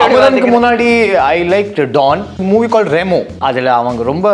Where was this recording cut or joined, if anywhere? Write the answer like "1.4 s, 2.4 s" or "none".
2.4 s, 3.4 s